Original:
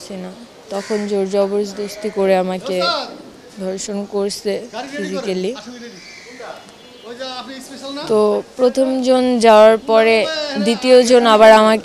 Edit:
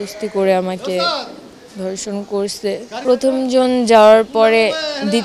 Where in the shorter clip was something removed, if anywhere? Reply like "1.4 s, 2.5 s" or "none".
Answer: 3.0 s